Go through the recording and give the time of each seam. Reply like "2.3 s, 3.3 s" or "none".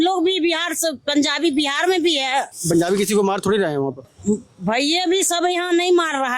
2.6 s